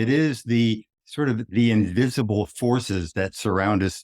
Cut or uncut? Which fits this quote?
cut